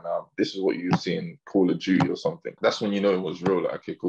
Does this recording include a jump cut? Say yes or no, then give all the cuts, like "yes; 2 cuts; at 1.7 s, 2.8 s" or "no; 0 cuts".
yes; 1 cut; at 2.6 s